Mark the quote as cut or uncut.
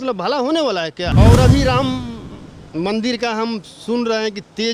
cut